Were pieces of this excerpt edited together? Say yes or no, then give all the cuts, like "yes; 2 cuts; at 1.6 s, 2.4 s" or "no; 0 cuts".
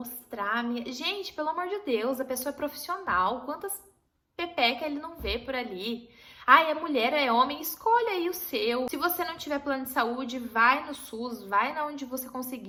no; 0 cuts